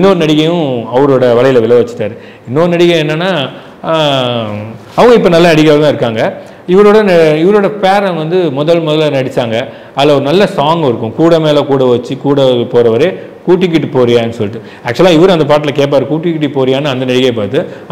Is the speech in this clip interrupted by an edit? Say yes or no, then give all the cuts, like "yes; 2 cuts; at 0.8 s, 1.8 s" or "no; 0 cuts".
no; 0 cuts